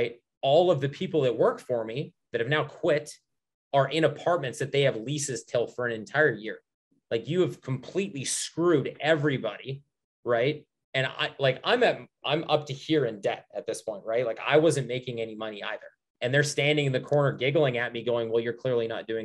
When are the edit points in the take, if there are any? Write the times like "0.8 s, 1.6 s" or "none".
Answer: 16.0 s